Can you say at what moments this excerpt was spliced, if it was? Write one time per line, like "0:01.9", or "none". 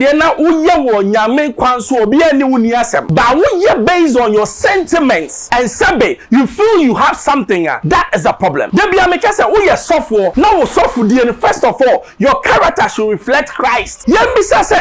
0:03.0
0:05.4
0:07.8
0:08.7
0:10.3
0:13.9